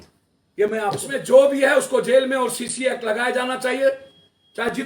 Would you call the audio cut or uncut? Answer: cut